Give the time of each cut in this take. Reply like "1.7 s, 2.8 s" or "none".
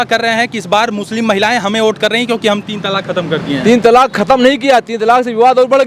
none